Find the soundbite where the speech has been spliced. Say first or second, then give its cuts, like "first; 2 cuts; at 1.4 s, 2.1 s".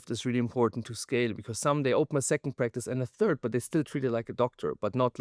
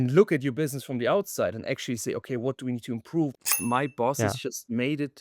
second; 1 cut; at 3.4 s